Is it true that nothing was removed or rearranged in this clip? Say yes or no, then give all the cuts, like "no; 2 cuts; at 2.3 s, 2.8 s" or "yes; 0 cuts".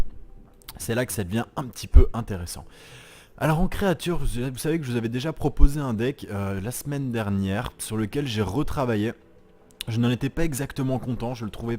no; 1 cut; at 8.3 s